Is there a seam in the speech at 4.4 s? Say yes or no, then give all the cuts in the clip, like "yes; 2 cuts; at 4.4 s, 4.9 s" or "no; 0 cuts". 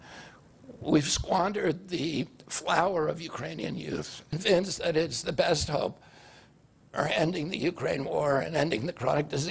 yes; 1 cut; at 4.4 s